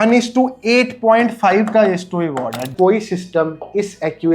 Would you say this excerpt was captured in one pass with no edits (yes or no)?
no